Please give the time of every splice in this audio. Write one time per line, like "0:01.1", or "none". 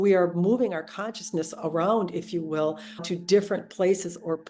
0:03.0